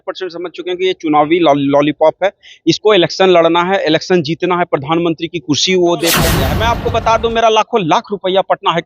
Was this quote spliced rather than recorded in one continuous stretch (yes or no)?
yes